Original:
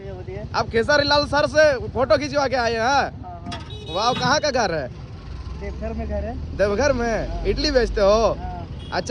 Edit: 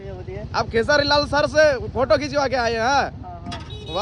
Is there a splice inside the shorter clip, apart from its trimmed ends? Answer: no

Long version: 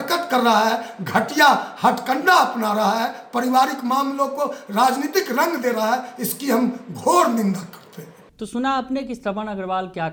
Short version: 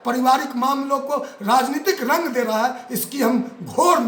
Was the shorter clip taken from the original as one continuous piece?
yes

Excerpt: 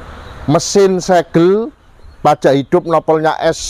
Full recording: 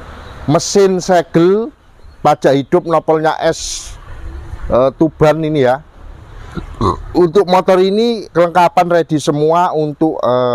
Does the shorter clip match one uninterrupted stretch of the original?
yes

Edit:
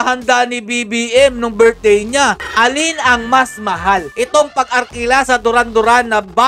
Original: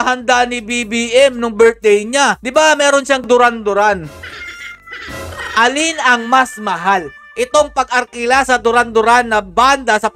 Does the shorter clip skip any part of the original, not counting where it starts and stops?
yes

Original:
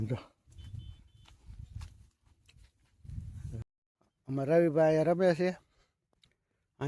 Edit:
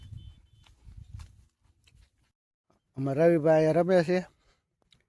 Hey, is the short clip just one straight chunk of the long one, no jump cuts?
no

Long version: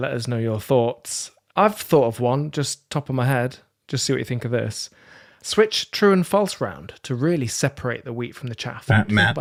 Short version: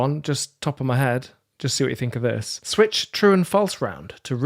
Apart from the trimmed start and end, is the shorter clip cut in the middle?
yes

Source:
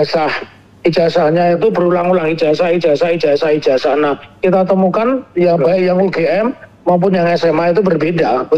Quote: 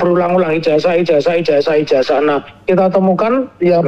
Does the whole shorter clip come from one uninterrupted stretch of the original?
yes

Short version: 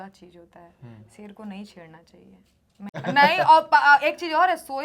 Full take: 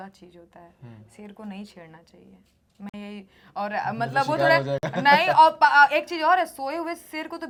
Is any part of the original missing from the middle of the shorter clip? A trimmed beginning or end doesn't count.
yes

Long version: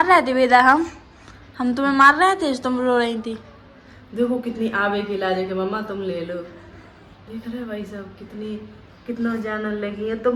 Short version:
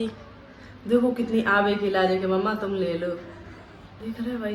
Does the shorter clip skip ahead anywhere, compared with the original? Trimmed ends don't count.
no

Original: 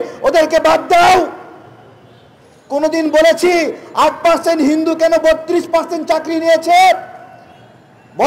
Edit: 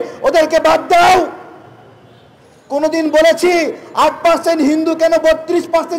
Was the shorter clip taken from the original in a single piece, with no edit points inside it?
yes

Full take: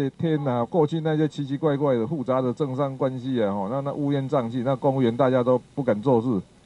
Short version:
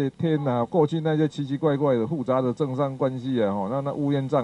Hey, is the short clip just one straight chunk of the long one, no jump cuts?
yes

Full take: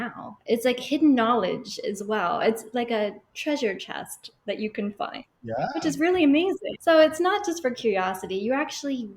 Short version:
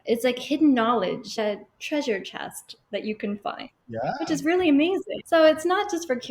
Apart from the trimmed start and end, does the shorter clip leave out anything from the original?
yes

